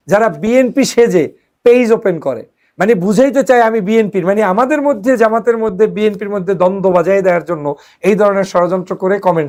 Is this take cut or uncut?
uncut